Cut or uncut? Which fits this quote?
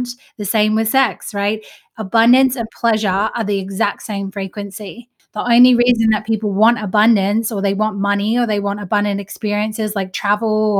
cut